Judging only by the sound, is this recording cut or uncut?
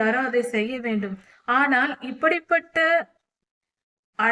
cut